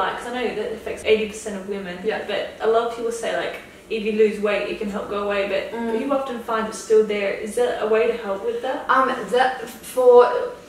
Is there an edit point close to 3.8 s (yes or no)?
no